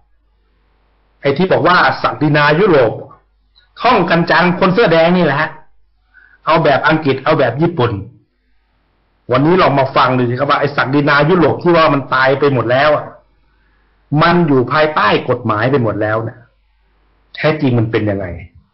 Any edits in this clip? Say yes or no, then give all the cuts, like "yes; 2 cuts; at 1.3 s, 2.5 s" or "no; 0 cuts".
yes; 1 cut; at 6.1 s